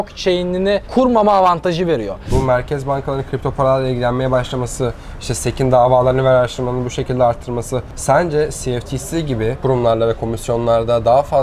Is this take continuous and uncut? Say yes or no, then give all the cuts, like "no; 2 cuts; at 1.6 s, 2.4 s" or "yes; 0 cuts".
no; 3 cuts; at 2.2 s, 7.9 s, 9.6 s